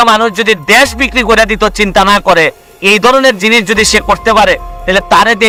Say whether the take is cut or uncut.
uncut